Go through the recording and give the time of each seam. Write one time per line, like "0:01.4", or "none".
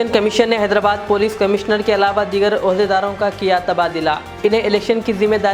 none